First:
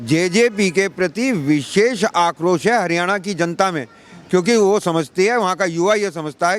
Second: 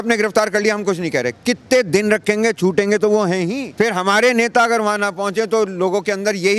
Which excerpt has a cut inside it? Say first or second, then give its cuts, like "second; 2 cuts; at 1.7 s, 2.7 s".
second; 1 cut; at 3.6 s